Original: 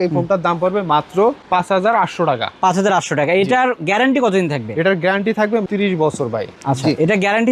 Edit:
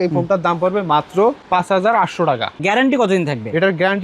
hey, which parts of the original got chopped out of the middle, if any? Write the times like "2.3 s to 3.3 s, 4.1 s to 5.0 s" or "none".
2.5 s to 3.8 s